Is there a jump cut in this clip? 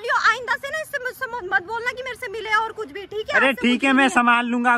no; 0 cuts

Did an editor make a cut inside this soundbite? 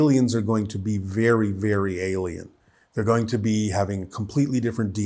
no; 0 cuts

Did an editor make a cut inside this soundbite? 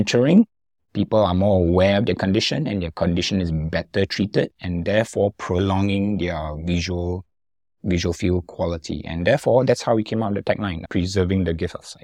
yes; 1 cut; at 10.8 s

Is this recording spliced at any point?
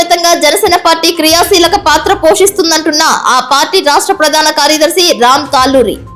no; 0 cuts

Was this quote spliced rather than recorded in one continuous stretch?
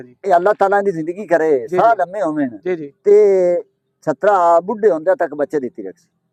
no; 0 cuts

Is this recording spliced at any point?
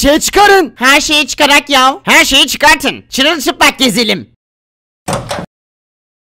no; 0 cuts

